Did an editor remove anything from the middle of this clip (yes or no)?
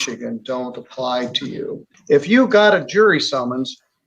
yes